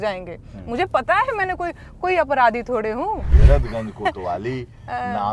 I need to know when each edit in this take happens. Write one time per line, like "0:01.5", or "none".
0:03.3